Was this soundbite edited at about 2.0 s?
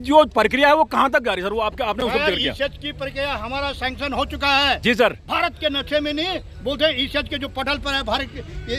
no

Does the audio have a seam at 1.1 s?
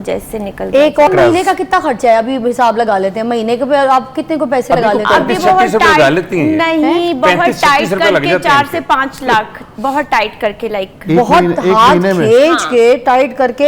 yes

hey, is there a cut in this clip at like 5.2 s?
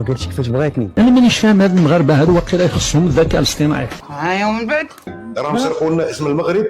yes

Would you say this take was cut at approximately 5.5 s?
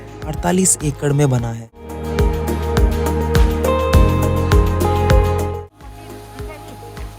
yes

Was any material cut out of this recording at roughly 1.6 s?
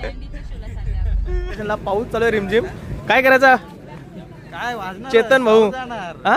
yes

